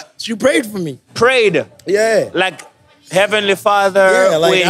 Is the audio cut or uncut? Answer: uncut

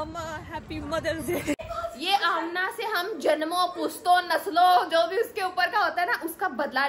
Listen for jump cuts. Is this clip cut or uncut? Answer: cut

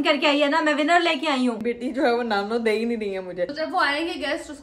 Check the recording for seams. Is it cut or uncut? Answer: cut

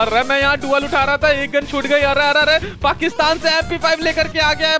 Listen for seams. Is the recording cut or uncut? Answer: uncut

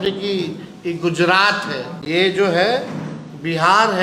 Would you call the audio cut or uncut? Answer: cut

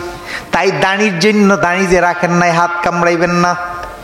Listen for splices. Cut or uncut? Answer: uncut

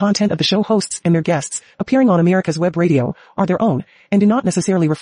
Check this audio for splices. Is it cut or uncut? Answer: uncut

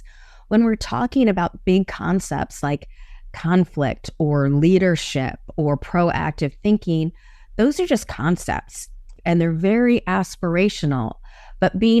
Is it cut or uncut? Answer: cut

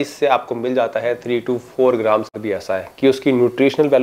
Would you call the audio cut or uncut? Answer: cut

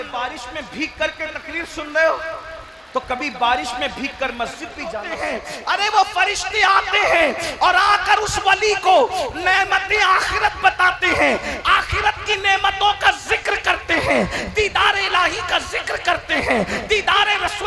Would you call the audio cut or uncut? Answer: cut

